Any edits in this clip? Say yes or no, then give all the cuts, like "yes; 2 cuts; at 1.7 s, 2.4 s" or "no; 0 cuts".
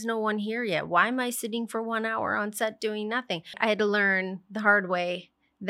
yes; 1 cut; at 3.5 s